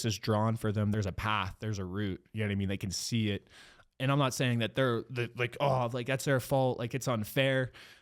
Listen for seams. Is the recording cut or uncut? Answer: cut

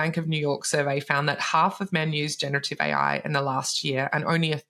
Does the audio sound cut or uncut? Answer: uncut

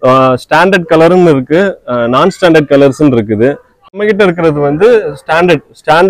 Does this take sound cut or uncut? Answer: cut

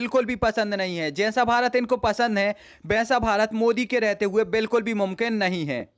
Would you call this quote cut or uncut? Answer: uncut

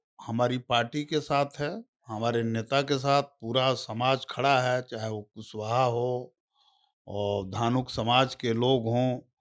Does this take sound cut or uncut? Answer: uncut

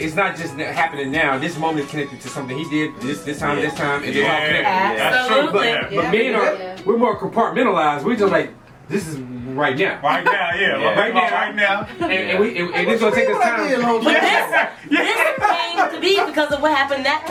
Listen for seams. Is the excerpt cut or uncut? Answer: uncut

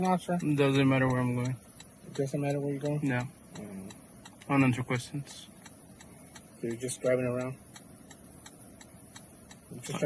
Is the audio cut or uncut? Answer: uncut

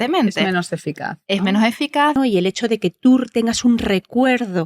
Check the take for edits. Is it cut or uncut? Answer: cut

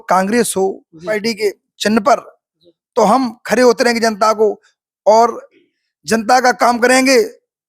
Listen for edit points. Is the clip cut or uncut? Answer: cut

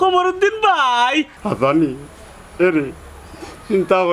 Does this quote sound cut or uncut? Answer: cut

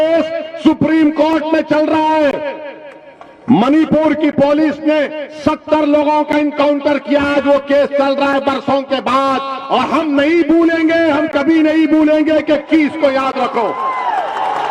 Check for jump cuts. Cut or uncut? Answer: uncut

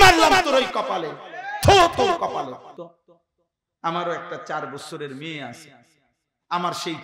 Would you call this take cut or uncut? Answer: cut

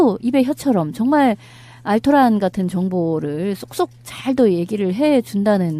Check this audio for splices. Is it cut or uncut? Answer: cut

